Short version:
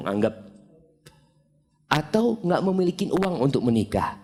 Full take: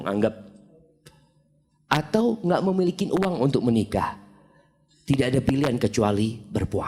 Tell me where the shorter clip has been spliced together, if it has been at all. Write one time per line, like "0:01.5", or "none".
none

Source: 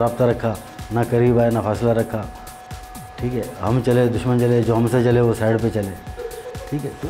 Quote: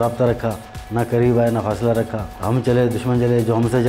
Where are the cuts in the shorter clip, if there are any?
0:02.3

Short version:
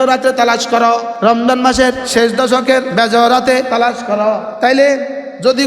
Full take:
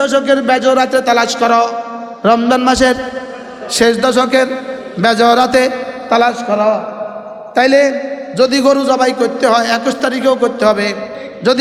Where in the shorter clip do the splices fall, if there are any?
0:01.1
0:02.0
0:02.9
0:03.9

